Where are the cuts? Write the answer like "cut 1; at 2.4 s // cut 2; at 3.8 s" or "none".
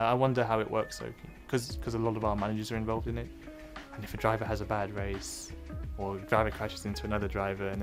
none